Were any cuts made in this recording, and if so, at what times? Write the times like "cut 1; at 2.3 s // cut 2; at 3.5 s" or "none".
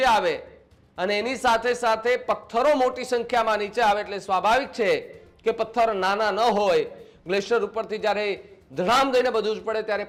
none